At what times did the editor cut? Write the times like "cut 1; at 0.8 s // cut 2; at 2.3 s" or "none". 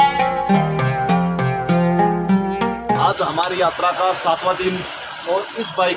cut 1; at 3.0 s